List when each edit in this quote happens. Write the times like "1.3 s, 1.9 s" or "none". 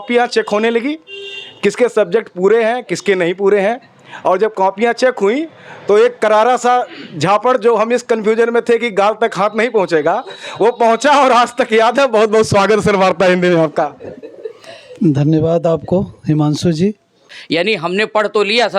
17.3 s